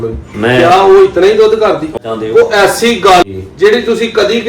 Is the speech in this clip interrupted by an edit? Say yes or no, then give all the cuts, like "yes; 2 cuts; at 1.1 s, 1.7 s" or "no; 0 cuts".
yes; 2 cuts; at 1.9 s, 3.2 s